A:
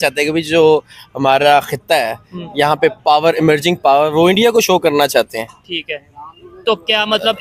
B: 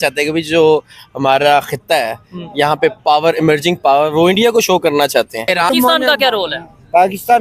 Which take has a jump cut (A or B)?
B